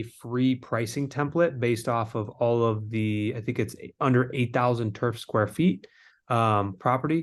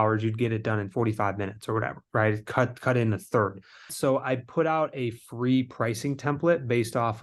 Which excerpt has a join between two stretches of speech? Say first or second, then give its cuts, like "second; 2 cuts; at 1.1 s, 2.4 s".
second; 1 cut; at 3.9 s